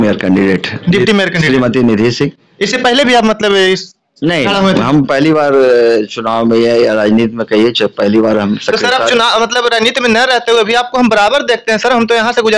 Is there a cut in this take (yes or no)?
no